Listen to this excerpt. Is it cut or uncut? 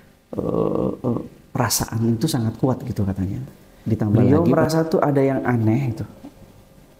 cut